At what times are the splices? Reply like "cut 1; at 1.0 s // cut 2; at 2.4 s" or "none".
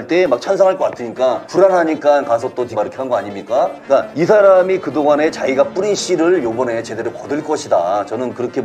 cut 1; at 1.4 s // cut 2; at 2.7 s // cut 3; at 4.0 s